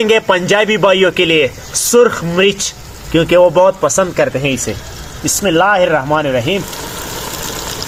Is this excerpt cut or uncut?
uncut